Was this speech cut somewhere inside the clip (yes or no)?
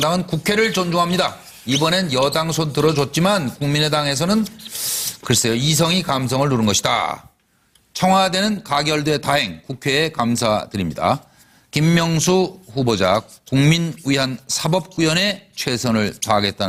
no